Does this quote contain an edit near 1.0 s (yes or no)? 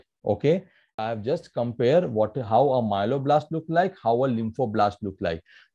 yes